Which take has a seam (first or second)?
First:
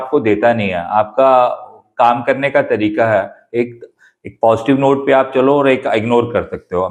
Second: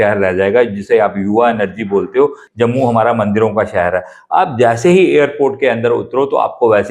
second